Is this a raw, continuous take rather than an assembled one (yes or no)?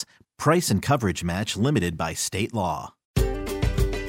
no